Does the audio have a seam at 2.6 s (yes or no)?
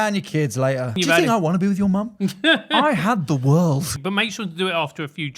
no